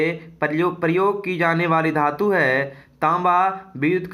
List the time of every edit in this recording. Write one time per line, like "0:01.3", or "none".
none